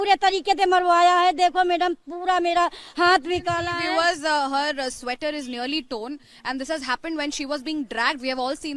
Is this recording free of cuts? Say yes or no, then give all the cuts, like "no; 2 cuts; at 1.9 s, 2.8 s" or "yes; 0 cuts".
yes; 0 cuts